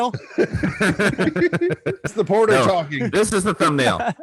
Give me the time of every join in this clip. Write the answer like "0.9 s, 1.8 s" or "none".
2.1 s